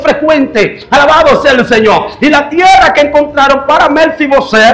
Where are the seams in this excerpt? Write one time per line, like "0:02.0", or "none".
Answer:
none